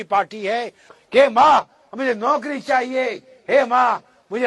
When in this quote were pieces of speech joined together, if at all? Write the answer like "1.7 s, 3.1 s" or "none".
0.9 s